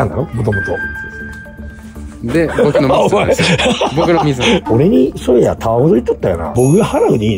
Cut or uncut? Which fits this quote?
cut